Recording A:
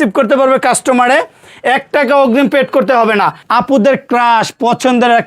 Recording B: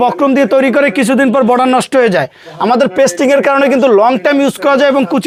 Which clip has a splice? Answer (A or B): A